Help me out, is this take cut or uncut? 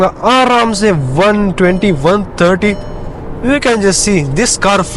uncut